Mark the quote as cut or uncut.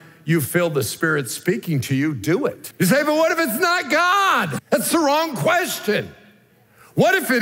cut